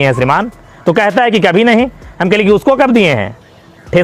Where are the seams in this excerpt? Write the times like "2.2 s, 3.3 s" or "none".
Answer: none